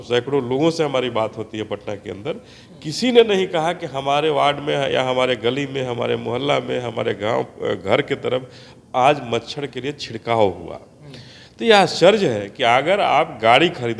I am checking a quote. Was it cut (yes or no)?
no